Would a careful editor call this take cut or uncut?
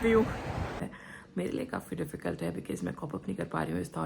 cut